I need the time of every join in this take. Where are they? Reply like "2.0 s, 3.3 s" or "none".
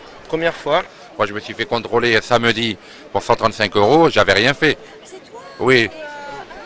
1.0 s

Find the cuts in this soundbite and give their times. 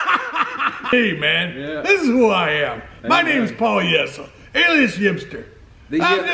0.9 s

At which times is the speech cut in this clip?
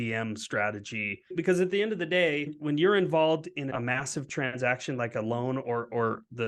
1.3 s, 2.6 s, 3.7 s

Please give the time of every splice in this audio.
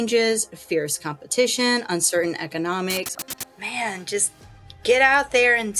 3.1 s

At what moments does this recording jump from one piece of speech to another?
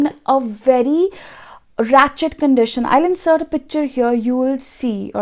none

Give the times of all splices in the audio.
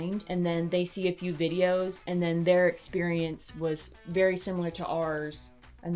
none

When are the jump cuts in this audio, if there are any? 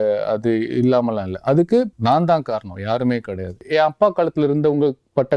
1.9 s, 3.6 s

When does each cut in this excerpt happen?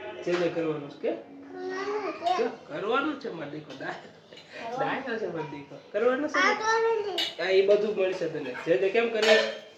none

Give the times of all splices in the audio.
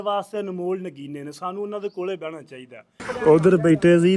3.2 s

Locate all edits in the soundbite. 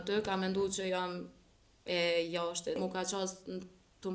2.8 s

